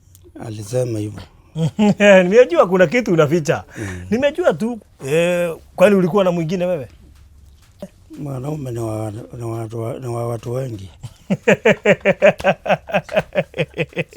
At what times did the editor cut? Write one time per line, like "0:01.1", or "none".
0:04.8
0:08.0